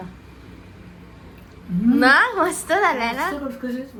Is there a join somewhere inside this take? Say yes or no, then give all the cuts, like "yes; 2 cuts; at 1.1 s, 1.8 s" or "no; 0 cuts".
no; 0 cuts